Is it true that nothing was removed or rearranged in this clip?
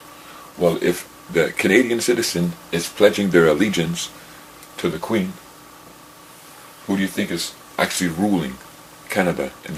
yes; 0 cuts

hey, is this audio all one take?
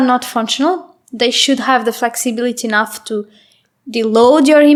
yes; 0 cuts

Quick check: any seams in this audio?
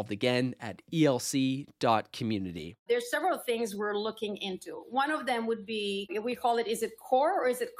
yes; 1 cut; at 2.8 s

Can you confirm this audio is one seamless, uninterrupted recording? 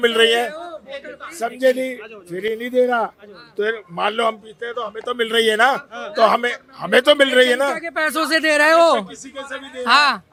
yes; 0 cuts

